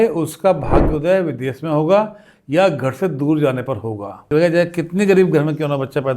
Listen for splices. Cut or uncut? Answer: cut